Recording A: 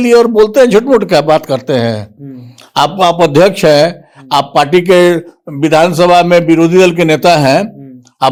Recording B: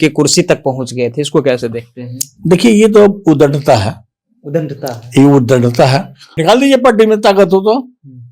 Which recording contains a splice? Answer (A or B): B